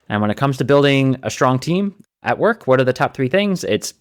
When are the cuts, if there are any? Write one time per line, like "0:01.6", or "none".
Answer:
none